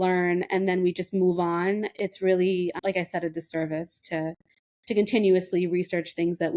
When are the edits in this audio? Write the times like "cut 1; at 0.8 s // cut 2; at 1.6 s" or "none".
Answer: cut 1; at 1.9 s // cut 2; at 2.8 s